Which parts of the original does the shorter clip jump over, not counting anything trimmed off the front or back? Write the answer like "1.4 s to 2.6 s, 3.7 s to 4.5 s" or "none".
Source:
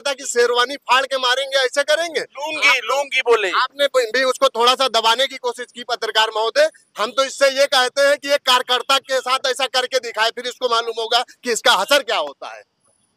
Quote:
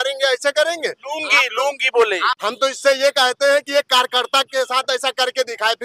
3.6 s to 6.9 s